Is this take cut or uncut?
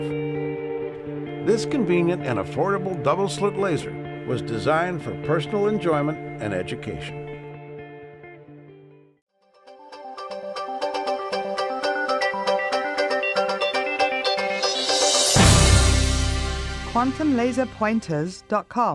cut